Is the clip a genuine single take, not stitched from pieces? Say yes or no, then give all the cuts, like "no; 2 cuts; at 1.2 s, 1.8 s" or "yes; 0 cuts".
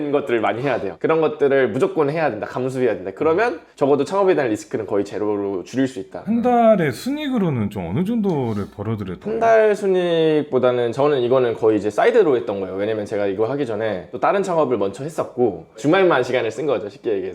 no; 2 cuts; at 6.1 s, 9.1 s